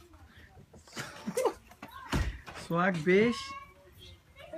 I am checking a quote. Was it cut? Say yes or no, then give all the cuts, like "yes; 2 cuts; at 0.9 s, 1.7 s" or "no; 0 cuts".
yes; 1 cut; at 3.1 s